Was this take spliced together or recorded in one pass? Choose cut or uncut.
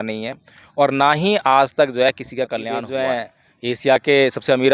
cut